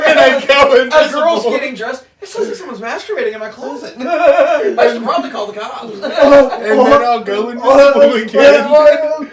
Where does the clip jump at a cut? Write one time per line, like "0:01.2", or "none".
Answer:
none